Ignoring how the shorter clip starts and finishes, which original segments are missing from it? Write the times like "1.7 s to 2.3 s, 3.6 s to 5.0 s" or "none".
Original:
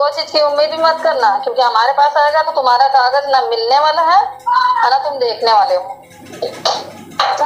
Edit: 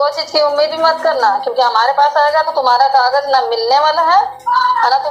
none